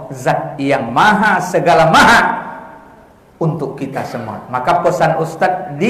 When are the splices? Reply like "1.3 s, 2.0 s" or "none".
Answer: none